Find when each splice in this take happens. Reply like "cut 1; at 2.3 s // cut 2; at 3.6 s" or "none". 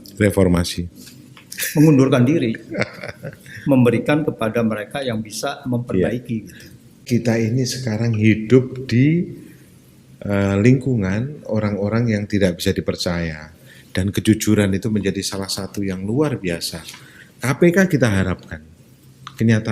cut 1; at 7.1 s